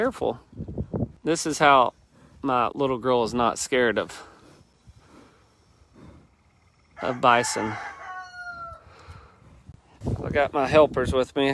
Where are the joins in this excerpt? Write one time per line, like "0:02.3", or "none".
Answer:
0:01.2
0:10.0